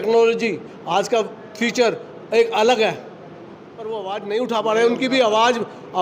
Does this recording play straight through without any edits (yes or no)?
no